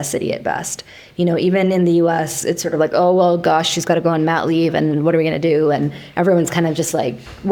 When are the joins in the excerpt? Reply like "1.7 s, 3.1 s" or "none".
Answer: none